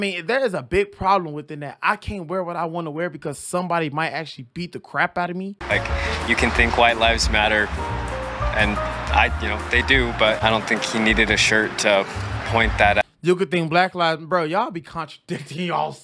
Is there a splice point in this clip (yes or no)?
yes